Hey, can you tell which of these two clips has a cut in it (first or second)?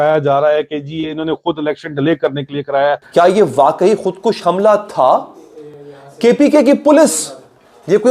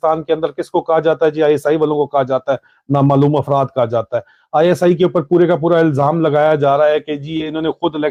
first